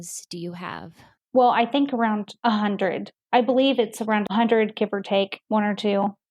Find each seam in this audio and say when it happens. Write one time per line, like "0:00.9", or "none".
0:01.1
0:04.2